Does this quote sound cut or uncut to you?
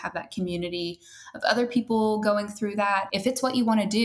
cut